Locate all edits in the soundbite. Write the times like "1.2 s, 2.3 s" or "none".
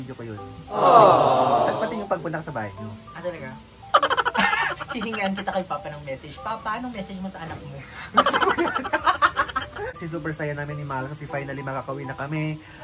10.0 s